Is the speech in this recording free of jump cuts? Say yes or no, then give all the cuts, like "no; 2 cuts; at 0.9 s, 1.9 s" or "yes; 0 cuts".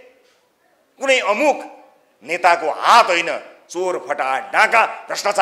yes; 0 cuts